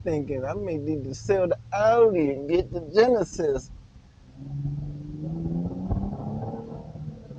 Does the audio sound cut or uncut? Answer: uncut